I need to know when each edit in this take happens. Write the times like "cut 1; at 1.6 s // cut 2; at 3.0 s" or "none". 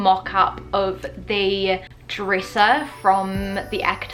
none

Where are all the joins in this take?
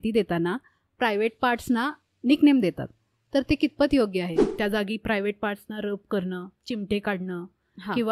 cut 1; at 4.4 s

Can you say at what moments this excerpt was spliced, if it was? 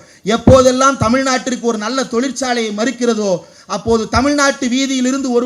none

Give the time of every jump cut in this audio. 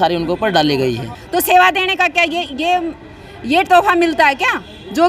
cut 1; at 1.1 s

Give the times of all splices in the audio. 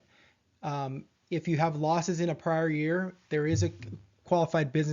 cut 1; at 3.6 s

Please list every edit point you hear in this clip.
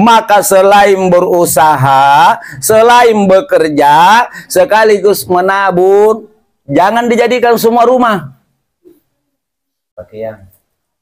none

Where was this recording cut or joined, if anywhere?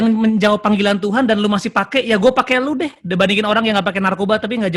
none

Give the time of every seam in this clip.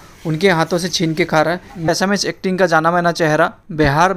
cut 1; at 1.9 s

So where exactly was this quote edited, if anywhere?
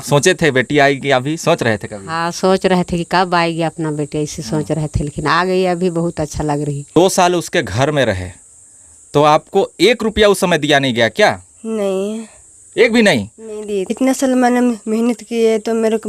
cut 1; at 6.9 s // cut 2; at 13.9 s

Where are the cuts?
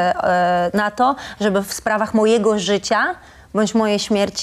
none

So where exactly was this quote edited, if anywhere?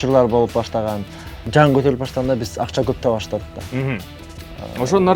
cut 1; at 1.4 s

